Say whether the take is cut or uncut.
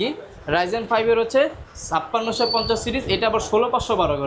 uncut